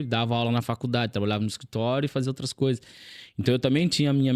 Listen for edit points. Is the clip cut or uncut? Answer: uncut